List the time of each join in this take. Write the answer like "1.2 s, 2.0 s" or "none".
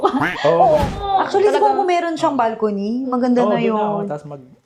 1.0 s

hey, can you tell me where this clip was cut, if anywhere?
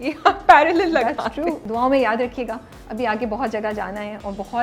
1.6 s

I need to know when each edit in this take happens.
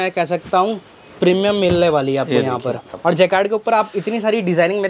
2.9 s

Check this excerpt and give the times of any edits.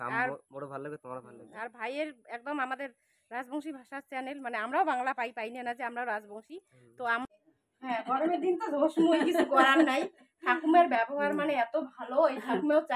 7.2 s

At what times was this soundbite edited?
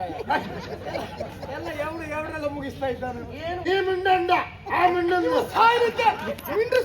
3.6 s

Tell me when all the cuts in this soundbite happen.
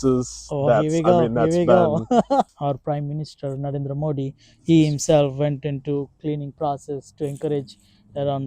2.5 s

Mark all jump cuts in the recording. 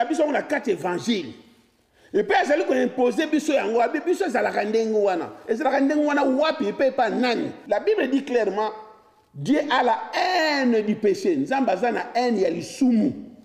7.5 s

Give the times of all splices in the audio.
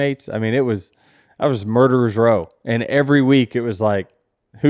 none

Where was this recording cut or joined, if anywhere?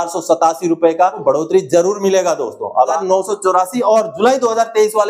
1.2 s, 3.0 s

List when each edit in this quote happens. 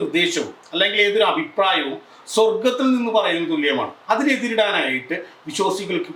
none

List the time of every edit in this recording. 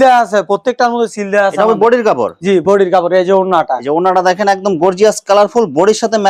none

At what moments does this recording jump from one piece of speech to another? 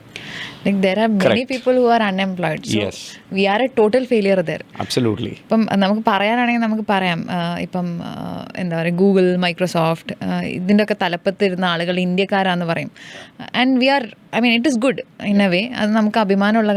none

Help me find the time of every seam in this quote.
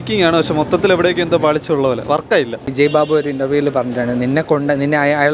2.6 s

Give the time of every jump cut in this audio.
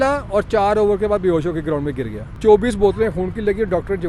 2.4 s

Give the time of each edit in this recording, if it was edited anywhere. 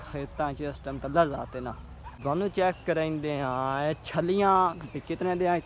2.2 s

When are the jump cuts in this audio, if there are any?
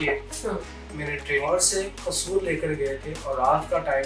1.4 s

